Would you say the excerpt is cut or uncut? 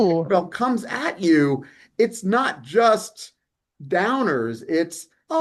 uncut